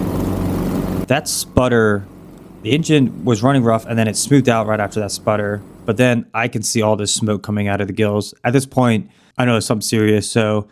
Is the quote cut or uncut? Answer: uncut